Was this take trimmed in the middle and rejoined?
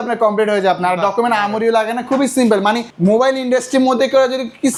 no; 0 cuts

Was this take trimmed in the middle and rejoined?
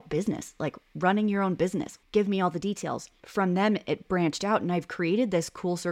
yes; 2 cuts; at 2.0 s, 3.2 s

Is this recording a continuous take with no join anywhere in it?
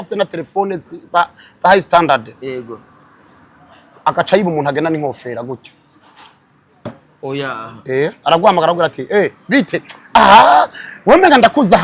yes; 0 cuts

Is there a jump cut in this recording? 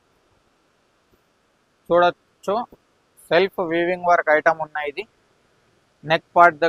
no; 0 cuts

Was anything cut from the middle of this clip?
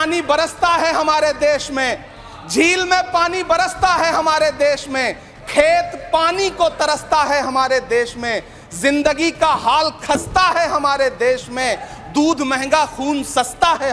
no; 0 cuts

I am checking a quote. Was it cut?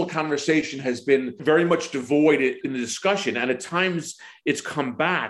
yes; 2 cuts; at 1.4 s, 2.6 s

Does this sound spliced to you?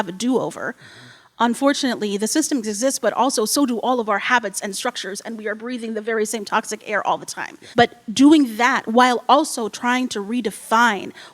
yes; 1 cut; at 7.6 s

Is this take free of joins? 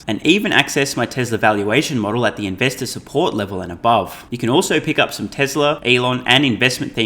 no; 2 cuts; at 4.2 s, 5.8 s

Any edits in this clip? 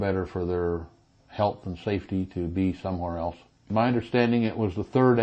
yes; 1 cut; at 3.7 s

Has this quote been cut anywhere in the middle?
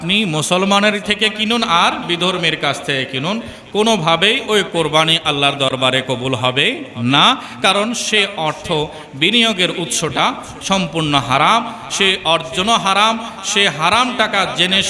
yes; 1 cut; at 1.0 s

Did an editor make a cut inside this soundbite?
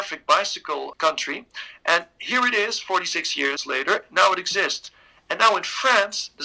yes; 2 cuts; at 0.9 s, 3.6 s

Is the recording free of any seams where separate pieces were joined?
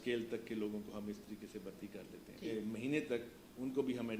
no; 1 cut; at 2.5 s

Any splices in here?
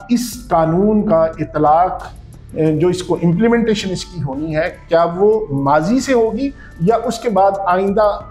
no; 0 cuts

